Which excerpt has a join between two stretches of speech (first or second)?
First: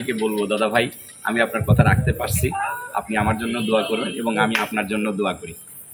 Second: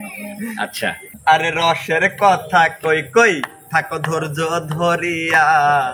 second